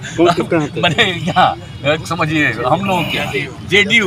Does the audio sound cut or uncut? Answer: uncut